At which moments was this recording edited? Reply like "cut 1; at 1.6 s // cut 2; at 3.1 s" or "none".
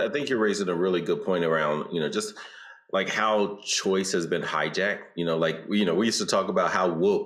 none